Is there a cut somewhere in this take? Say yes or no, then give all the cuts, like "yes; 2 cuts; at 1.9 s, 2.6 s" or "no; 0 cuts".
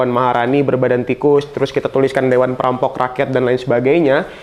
no; 0 cuts